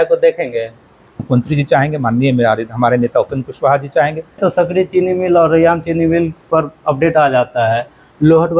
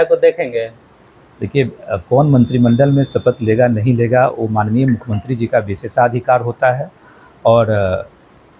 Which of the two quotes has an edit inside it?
first; 2 cuts; at 1.2 s, 4.4 s

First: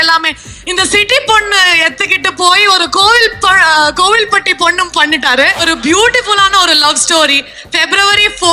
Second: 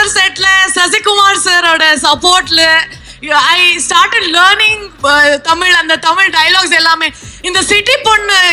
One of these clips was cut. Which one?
first; 1 cut; at 5.6 s

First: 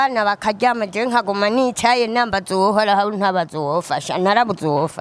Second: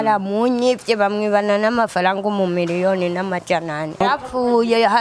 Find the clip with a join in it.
second; 1 cut; at 4.0 s

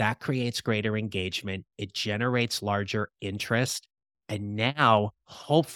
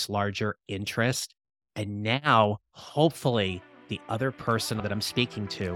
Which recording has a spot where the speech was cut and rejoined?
second; 1 cut; at 4.8 s

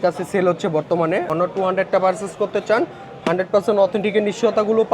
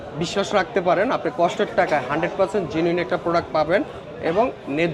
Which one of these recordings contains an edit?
first; 1 cut; at 1.3 s

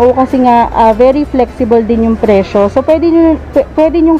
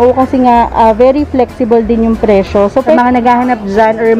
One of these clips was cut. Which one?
second; 1 cut; at 3.0 s

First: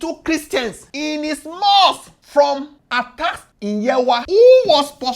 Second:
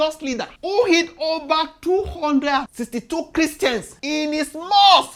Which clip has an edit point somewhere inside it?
first; 1 cut; at 4.2 s

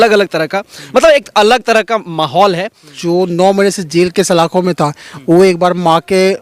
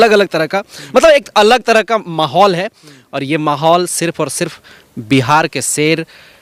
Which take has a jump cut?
first; 1 cut; at 2.9 s

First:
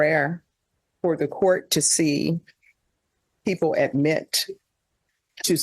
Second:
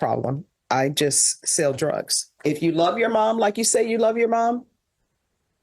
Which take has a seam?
second; 1 cut; at 2.3 s

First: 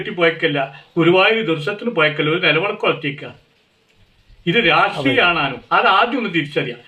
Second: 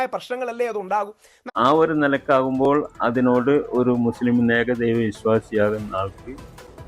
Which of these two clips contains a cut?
second; 1 cut; at 1.5 s

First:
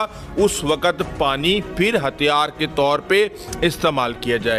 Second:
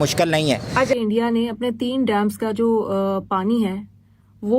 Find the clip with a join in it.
second; 1 cut; at 1.0 s

